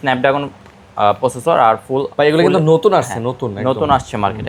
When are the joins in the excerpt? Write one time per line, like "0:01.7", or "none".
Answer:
none